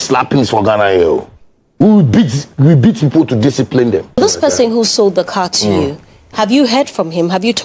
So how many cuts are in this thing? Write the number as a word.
one